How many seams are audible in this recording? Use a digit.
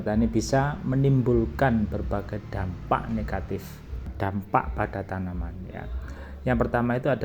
1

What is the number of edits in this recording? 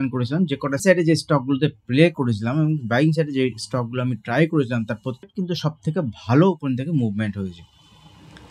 2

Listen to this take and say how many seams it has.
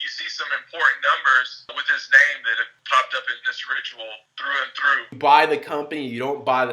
1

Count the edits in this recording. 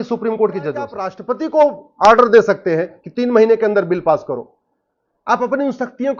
1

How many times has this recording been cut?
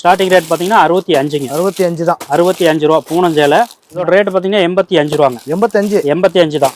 1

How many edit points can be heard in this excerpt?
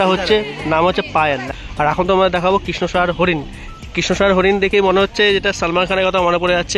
1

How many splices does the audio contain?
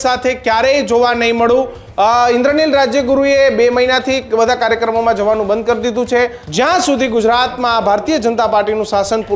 2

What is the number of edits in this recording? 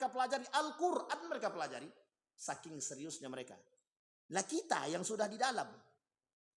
0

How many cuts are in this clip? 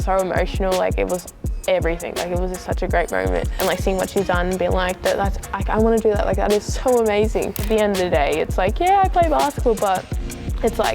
2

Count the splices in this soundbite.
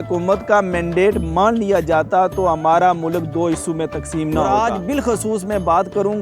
1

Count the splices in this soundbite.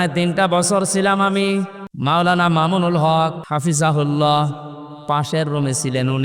2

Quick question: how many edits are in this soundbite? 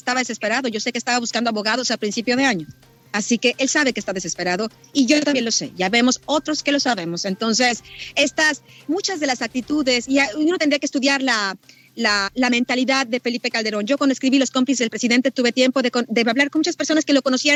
0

